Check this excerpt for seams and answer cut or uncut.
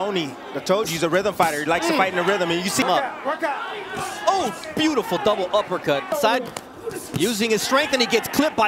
cut